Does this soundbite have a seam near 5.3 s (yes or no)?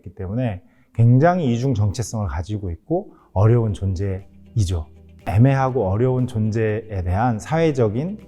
yes